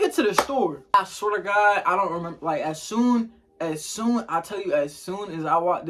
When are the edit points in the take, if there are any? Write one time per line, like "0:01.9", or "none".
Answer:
0:00.9